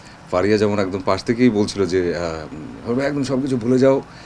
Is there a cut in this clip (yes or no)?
no